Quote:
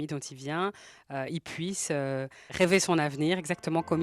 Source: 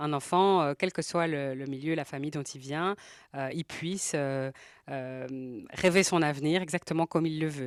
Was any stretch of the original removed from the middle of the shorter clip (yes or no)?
yes